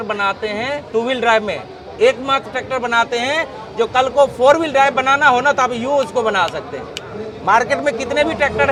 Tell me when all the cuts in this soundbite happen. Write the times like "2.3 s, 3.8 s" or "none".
none